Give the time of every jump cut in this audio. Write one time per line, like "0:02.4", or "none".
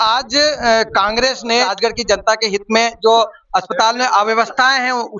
0:01.7

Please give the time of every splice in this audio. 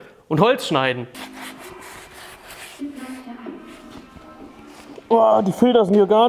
0:01.0

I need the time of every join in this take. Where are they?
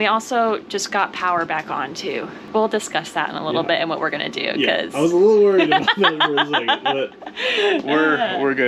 none

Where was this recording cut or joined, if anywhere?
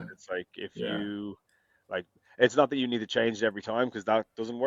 none

